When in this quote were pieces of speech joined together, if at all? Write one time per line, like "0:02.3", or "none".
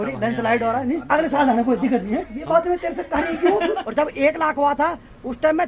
0:01.0
0:02.3
0:03.8